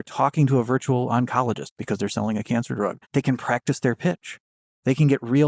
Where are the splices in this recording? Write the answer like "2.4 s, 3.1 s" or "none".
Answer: 3.0 s

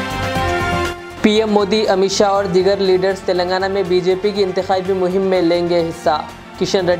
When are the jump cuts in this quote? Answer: 1.0 s

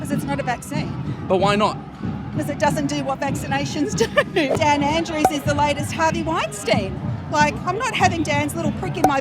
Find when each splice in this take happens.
4.5 s

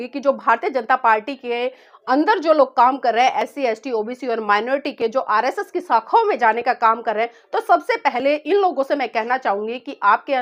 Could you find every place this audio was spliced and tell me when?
none

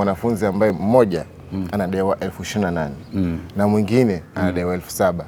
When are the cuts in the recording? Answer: none

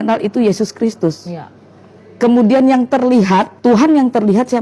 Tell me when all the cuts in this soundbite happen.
3.5 s

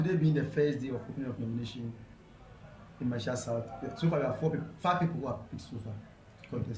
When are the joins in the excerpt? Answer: none

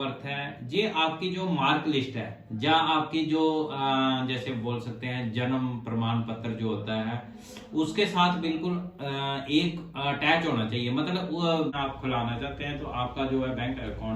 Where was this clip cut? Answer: 11.7 s

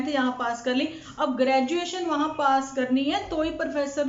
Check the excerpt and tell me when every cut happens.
none

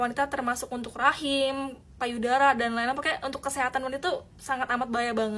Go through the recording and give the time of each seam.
none

